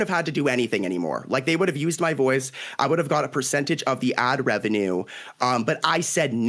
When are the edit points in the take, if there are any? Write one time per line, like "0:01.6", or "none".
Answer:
none